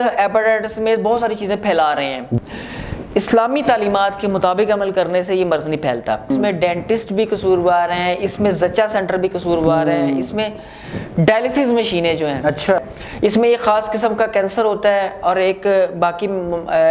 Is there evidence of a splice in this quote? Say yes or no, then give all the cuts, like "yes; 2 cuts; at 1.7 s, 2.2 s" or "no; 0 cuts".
yes; 3 cuts; at 2.4 s, 6.3 s, 12.8 s